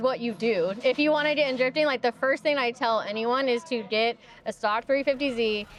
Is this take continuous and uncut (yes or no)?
yes